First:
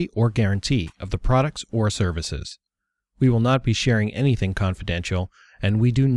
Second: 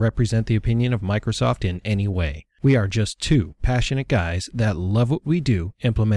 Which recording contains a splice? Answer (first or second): second